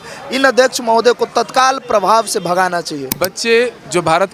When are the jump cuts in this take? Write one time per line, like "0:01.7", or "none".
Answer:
0:03.1